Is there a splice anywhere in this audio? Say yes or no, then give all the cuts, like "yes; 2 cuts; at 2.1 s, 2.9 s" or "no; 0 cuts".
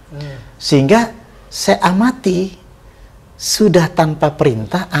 no; 0 cuts